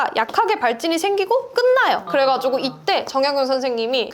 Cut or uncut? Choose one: cut